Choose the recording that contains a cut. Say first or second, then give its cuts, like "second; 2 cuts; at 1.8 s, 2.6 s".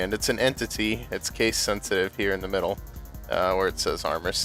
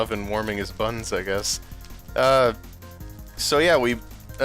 second; 1 cut; at 1.5 s